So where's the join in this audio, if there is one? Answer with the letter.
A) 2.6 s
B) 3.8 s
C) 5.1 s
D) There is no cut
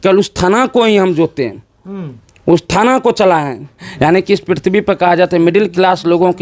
B